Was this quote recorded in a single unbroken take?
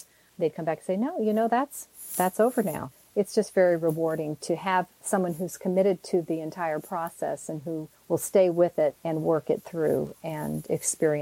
no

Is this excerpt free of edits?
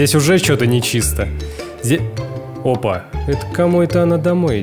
no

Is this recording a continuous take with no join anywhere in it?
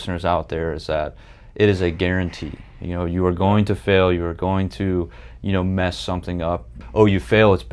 no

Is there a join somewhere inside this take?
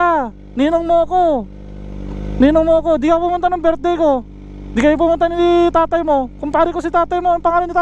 no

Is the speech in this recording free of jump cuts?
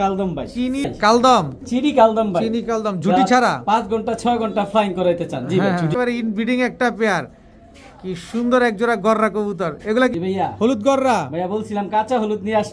no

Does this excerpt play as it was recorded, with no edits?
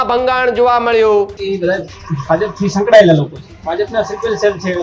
no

